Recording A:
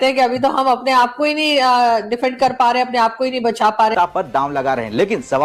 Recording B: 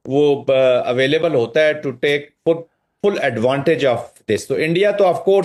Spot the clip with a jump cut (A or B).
A